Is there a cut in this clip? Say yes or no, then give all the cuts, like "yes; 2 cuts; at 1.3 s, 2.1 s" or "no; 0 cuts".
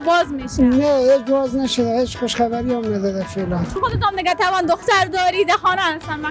yes; 1 cut; at 3.8 s